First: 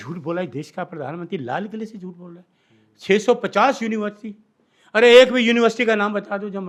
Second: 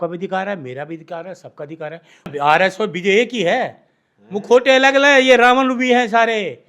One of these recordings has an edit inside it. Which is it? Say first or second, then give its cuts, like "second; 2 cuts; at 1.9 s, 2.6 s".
second; 1 cut; at 2.3 s